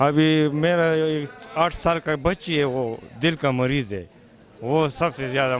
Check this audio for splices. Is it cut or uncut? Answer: uncut